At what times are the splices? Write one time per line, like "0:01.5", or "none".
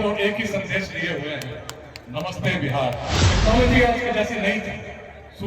0:03.2